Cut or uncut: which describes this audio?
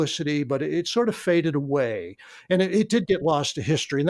uncut